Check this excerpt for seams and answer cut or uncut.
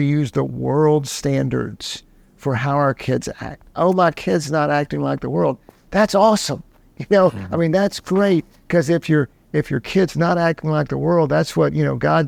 uncut